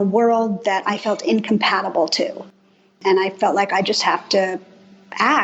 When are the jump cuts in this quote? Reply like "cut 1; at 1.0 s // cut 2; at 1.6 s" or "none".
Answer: cut 1; at 3.0 s